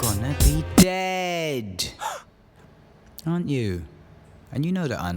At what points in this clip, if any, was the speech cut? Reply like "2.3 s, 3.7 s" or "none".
2.3 s